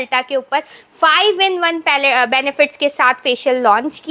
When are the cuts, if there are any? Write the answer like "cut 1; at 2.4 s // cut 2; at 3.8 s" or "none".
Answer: none